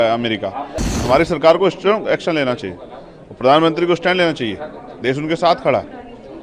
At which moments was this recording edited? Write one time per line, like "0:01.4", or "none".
0:00.9